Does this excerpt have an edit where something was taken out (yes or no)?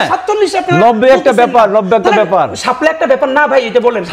no